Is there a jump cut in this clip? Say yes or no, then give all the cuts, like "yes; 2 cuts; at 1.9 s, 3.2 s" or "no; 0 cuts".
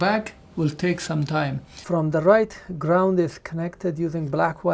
yes; 1 cut; at 1.8 s